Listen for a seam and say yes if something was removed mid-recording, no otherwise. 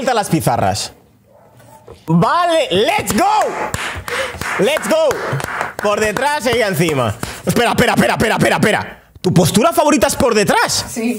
yes